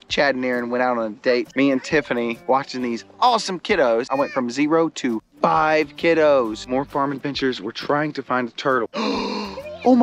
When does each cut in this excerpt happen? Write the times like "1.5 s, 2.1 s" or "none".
1.5 s, 2.4 s, 4.1 s, 6.7 s, 9.0 s

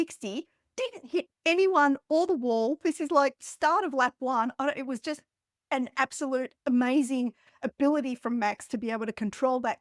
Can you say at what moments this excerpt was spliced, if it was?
none

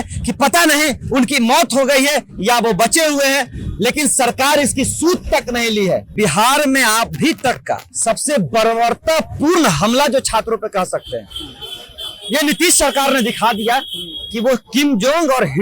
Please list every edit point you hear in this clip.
6.1 s

